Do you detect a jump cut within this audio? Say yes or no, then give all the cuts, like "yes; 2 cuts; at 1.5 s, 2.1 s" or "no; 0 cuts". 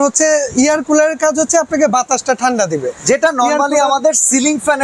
no; 0 cuts